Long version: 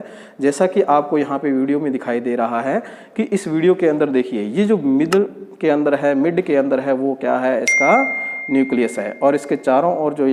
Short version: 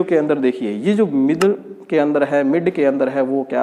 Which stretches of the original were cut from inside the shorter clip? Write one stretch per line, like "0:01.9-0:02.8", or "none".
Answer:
none